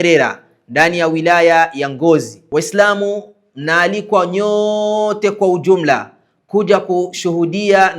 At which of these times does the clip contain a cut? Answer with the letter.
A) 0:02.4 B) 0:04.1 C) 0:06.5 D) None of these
A